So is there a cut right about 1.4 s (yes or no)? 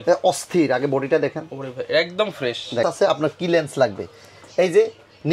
no